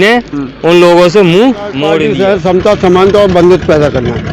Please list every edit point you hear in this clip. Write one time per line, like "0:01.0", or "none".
0:02.0